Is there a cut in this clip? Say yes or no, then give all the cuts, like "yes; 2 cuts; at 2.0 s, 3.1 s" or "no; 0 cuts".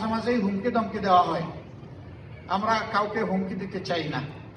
no; 0 cuts